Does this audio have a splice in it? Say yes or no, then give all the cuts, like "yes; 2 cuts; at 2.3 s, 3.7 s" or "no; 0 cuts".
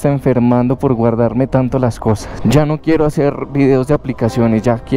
yes; 1 cut; at 2.3 s